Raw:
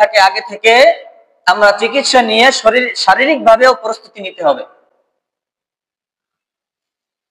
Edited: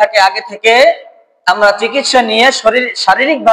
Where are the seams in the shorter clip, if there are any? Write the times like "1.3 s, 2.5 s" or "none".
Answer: none

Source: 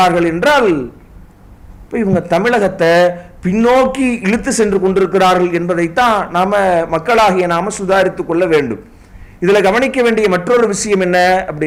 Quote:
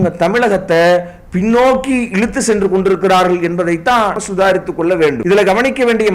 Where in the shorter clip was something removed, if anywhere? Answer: 4.2 s, 5.2 s

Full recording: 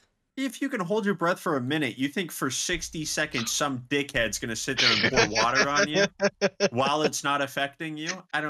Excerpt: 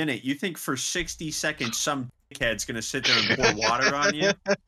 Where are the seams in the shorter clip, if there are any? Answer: none

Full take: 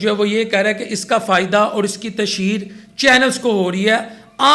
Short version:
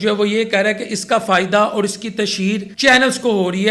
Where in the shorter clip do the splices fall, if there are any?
2.7 s

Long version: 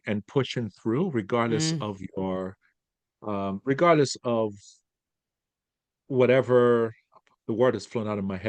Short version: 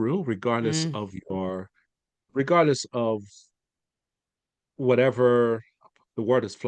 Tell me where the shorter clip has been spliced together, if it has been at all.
2.3 s

